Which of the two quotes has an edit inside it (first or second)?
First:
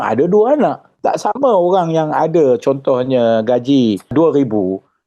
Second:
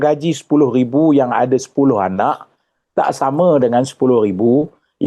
first